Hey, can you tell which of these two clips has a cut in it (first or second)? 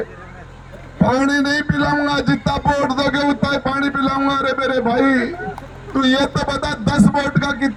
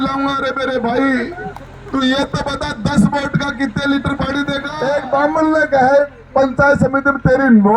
second